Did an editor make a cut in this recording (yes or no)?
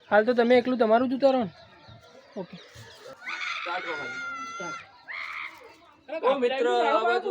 yes